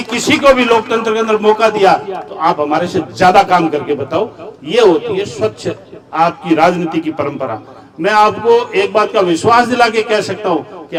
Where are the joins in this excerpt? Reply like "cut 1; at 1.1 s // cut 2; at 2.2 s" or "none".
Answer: none